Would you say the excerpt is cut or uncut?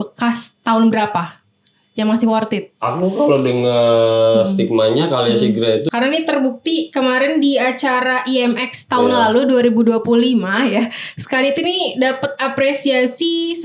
cut